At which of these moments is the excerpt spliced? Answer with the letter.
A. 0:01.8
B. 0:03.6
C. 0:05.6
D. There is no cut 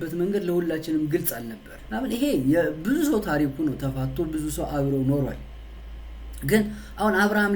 A